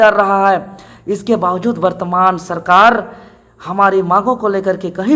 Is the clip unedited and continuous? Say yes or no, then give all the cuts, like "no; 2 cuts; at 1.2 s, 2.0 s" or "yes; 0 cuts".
yes; 0 cuts